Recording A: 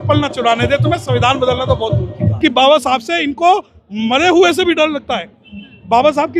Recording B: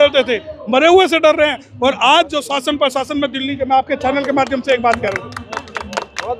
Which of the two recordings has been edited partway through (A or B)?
A